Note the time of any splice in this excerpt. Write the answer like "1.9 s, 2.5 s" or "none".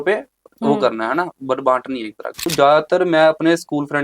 2.3 s